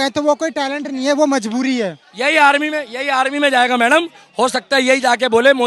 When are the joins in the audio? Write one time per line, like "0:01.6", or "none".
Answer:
0:02.1